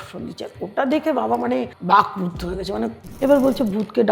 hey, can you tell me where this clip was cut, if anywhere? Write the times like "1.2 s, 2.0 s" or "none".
1.7 s, 3.0 s